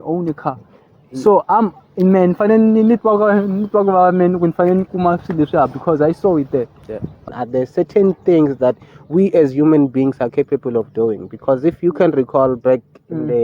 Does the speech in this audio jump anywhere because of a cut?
yes; 1 cut; at 7.3 s

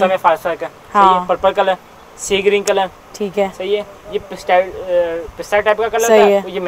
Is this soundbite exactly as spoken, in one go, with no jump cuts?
yes; 0 cuts

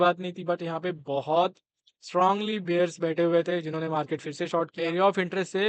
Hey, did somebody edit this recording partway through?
yes; 1 cut; at 4.7 s

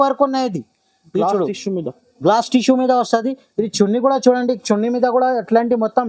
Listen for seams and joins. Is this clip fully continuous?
yes; 0 cuts

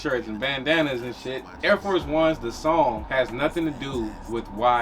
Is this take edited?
yes; 2 cuts; at 1.5 s, 3.0 s

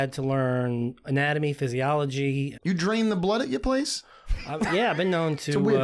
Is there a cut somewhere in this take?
yes; 1 cut; at 2.5 s

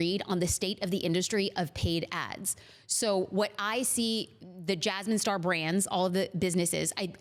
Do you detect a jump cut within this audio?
no; 0 cuts

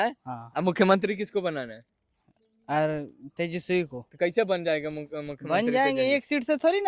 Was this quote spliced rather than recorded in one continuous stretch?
no; 0 cuts

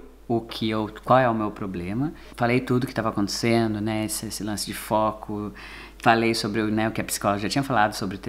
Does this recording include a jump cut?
no; 0 cuts

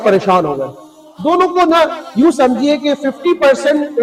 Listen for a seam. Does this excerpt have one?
no; 0 cuts

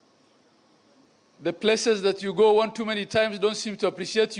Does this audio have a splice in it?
yes; 1 cut; at 0.9 s

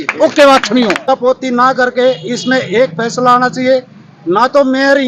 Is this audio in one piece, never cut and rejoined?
no; 1 cut; at 1.0 s

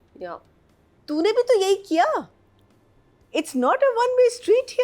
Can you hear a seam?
no; 0 cuts

